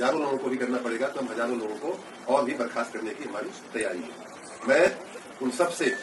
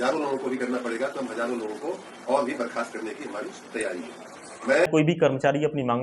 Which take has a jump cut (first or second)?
second